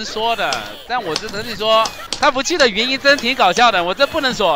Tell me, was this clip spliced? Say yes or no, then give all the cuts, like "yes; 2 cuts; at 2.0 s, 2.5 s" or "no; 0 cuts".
yes; 1 cut; at 2.0 s